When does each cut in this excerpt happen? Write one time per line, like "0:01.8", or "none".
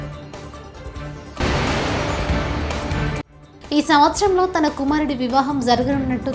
0:01.4
0:03.4